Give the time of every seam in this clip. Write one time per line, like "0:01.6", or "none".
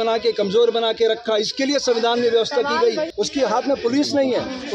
0:03.1